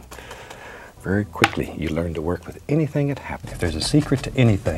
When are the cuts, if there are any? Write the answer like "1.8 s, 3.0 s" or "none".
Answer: 3.4 s

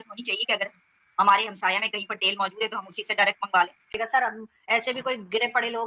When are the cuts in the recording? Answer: 4.0 s

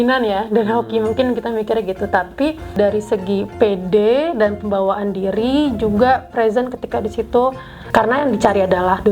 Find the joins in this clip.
2.7 s, 7.7 s

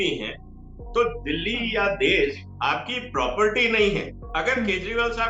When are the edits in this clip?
4.2 s

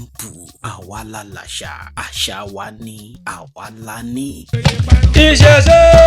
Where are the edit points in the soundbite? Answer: 4.4 s

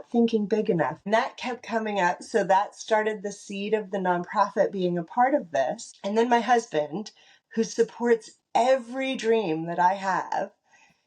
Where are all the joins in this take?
1.0 s, 5.9 s

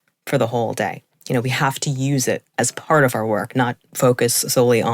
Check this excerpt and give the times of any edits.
1.1 s, 2.5 s, 3.8 s

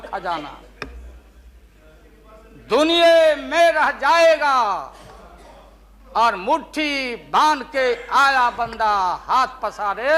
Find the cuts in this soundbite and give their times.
none

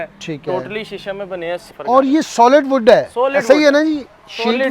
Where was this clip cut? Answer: 1.7 s

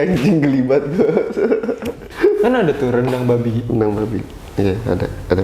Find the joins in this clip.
2.1 s

